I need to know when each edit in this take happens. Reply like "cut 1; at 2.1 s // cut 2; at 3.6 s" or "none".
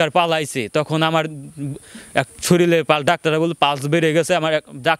none